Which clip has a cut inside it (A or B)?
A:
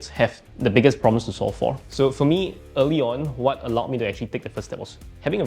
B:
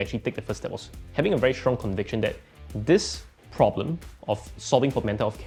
A